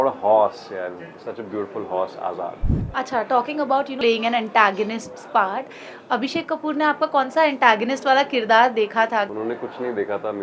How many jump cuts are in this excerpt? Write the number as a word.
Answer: three